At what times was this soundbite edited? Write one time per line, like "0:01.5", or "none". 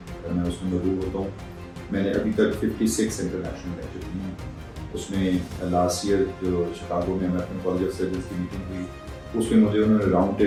none